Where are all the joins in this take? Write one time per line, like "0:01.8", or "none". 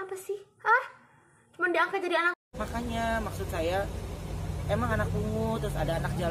0:02.4